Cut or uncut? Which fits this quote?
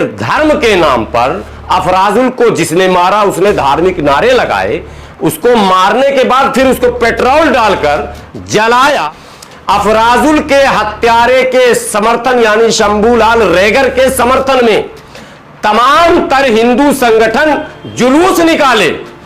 cut